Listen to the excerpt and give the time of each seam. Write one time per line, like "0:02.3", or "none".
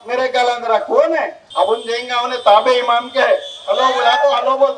0:01.4